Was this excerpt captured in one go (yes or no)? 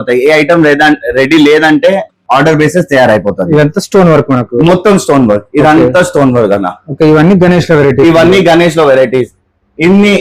yes